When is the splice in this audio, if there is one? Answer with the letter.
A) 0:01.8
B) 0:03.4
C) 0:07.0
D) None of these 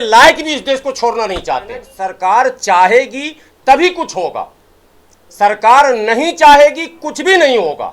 A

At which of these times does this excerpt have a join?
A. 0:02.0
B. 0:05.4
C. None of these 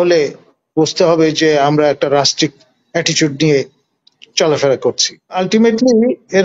B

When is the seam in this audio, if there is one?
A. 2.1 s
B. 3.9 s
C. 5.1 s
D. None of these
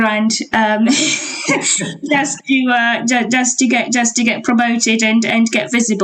D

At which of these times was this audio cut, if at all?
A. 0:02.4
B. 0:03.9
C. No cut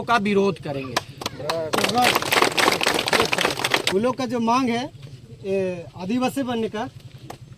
B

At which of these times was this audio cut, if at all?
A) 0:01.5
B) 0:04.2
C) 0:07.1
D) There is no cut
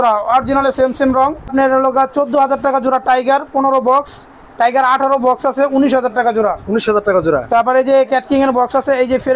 A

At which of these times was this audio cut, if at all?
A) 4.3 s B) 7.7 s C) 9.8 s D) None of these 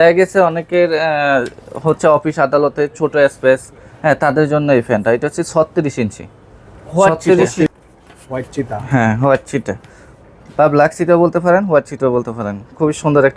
B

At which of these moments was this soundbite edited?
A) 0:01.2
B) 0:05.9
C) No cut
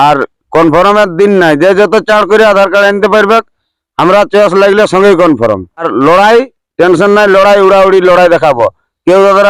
B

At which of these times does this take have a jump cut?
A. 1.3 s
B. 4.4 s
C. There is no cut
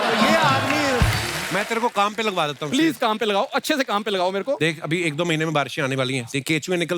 A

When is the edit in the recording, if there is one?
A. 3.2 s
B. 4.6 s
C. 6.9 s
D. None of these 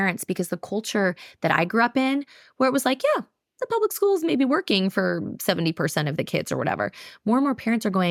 D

